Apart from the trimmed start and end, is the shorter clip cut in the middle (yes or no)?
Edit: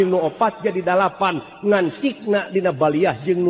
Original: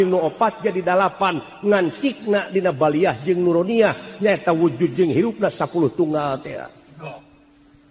no